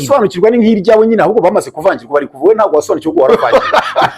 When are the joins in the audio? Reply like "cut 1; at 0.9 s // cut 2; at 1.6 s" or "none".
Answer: none